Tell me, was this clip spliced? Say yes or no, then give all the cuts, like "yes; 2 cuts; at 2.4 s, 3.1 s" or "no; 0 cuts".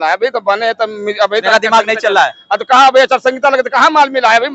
no; 0 cuts